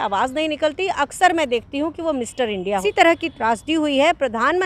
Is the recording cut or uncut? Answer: cut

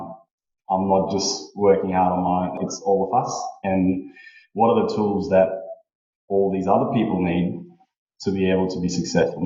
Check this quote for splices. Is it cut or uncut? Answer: cut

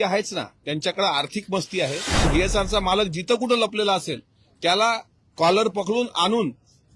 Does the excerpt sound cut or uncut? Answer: cut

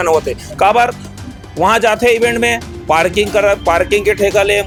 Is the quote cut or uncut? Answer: uncut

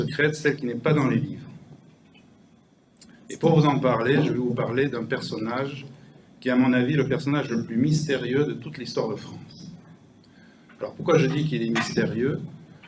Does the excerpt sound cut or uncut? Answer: uncut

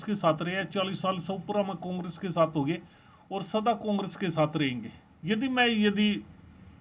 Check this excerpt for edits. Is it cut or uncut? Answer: cut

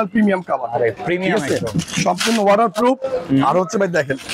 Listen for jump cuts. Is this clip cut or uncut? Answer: uncut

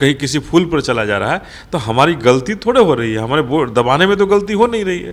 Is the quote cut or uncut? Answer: uncut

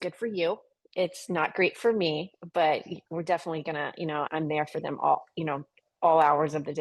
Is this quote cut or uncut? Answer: cut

